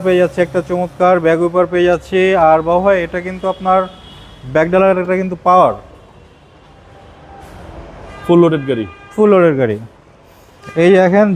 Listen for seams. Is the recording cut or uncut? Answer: uncut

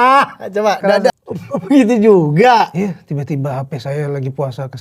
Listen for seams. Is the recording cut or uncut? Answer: cut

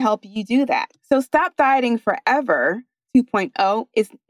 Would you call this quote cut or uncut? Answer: cut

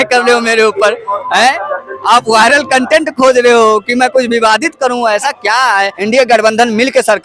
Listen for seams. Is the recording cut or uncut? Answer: cut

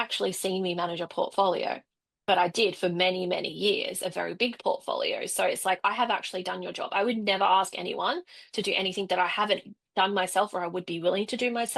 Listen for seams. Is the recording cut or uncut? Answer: uncut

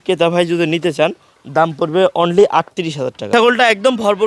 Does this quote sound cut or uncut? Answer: cut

